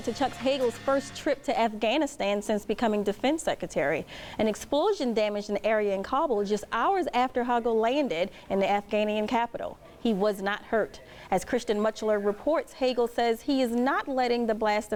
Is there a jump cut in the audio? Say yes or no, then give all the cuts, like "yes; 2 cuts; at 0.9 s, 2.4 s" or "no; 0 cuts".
no; 0 cuts